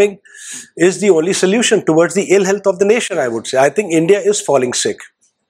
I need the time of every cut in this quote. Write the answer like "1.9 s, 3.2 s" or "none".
none